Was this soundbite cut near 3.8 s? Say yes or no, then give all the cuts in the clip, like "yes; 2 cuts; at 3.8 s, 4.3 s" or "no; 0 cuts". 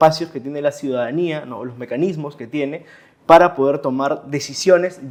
no; 0 cuts